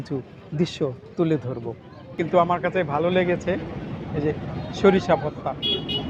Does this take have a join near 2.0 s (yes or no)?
yes